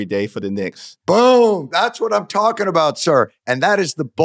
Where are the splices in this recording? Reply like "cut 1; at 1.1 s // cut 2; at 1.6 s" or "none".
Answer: none